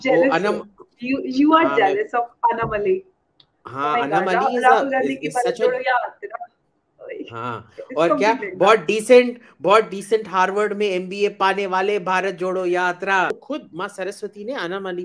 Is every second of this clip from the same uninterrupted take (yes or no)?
no